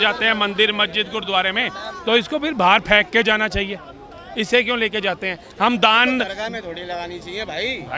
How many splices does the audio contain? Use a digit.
0